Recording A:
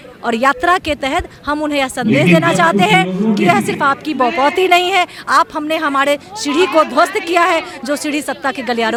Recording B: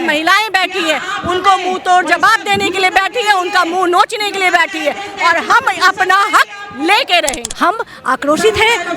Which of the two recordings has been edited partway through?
B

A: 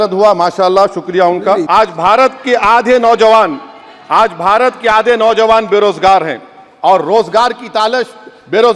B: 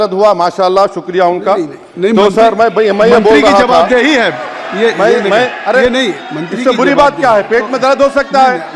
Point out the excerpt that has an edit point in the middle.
A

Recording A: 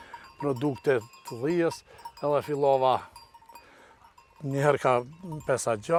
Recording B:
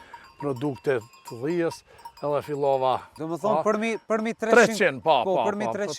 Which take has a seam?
B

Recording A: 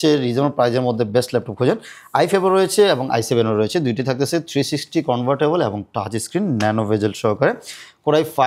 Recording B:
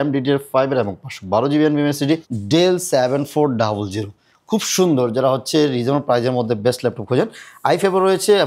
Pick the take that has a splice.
B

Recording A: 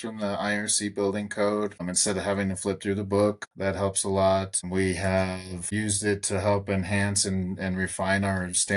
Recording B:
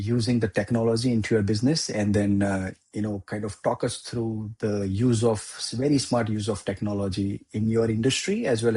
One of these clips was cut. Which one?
A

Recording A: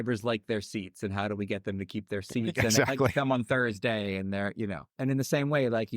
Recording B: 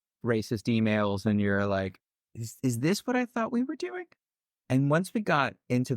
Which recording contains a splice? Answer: A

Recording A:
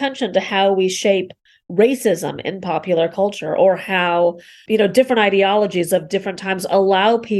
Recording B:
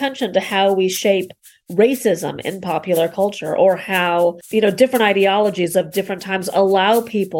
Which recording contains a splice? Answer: B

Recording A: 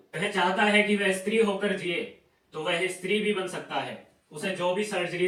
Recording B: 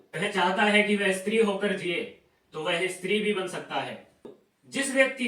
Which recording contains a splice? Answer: B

